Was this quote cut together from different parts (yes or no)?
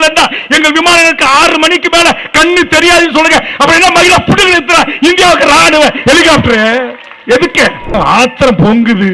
yes